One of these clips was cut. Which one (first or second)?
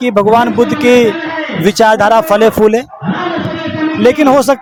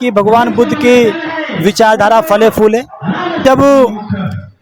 second